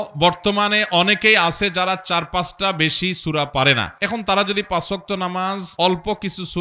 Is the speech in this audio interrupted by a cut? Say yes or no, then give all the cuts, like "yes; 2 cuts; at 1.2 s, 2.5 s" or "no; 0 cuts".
yes; 2 cuts; at 3.9 s, 5.7 s